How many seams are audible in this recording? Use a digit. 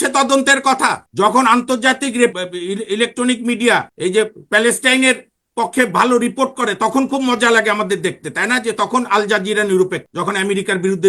4